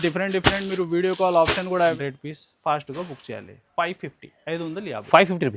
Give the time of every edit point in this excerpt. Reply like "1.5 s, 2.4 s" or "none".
1.9 s

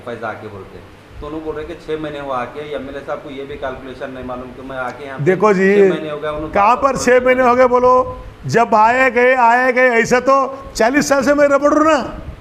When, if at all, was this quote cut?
none

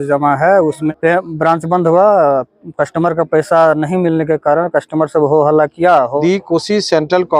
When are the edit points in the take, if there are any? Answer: 0.9 s, 6.1 s

